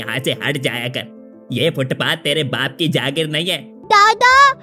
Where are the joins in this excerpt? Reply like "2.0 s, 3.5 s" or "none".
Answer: 3.7 s